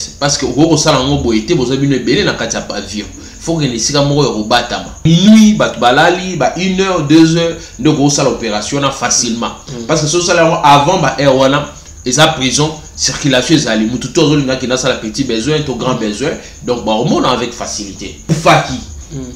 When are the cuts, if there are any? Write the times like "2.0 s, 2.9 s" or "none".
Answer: 5.0 s, 18.3 s